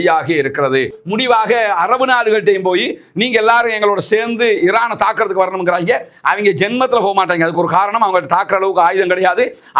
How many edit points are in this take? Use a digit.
1